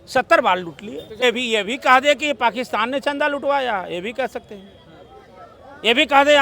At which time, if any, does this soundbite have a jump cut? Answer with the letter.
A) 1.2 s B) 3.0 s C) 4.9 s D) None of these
A